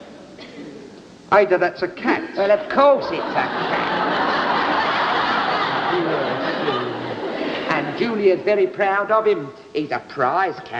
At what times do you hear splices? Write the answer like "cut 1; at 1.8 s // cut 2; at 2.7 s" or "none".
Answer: cut 1; at 7.0 s